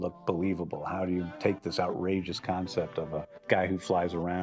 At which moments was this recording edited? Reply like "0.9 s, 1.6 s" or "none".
1.6 s